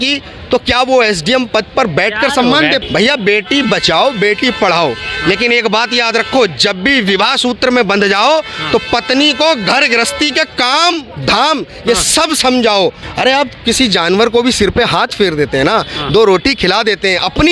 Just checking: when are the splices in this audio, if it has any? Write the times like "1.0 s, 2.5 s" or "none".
2.8 s, 13.0 s